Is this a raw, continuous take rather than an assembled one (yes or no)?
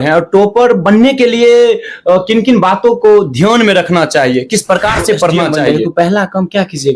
no